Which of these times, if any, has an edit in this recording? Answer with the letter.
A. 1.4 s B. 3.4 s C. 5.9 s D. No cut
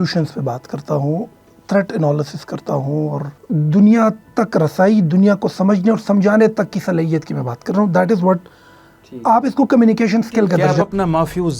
B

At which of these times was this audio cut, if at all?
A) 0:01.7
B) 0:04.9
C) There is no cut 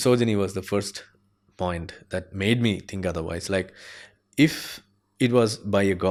C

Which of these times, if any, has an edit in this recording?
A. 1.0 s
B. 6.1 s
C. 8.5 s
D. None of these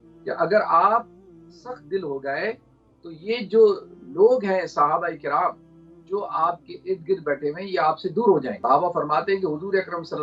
C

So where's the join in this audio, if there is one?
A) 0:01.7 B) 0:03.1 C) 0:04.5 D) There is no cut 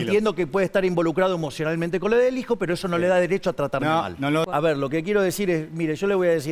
C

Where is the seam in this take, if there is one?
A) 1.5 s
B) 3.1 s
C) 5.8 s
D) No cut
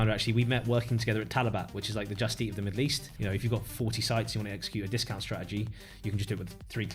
B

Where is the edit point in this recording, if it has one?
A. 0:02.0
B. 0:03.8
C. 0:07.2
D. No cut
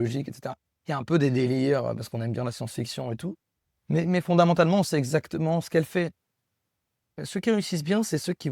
C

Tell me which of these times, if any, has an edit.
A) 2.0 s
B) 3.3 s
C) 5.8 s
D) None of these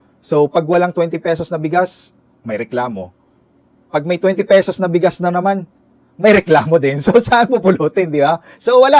D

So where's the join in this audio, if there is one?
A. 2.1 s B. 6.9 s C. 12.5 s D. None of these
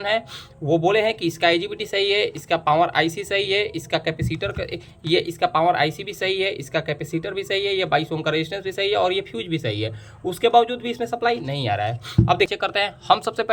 C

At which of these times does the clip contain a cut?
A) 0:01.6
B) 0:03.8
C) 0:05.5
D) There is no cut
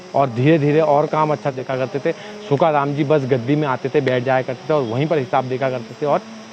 A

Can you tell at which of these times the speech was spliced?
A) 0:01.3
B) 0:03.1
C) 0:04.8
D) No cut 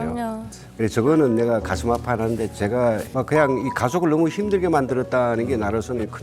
B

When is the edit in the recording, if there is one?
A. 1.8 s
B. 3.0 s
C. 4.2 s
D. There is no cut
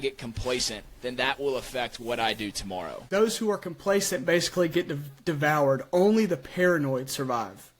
B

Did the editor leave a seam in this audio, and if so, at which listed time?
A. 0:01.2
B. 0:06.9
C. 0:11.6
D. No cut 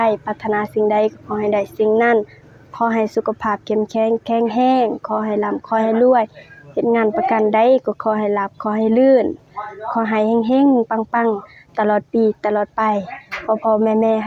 D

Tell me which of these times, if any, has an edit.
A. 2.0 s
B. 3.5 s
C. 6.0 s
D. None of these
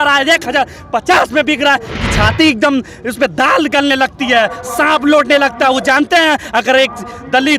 A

